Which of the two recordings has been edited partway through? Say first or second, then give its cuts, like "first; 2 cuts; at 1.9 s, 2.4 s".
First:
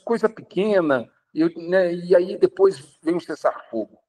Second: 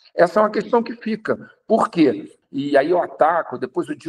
second; 1 cut; at 2.3 s